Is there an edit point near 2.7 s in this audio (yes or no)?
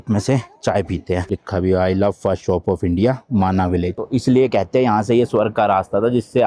no